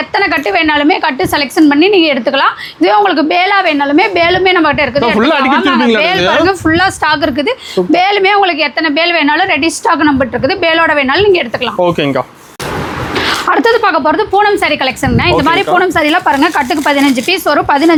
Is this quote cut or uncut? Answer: uncut